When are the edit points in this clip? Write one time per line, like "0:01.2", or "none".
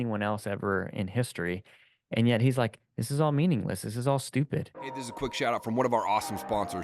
0:04.8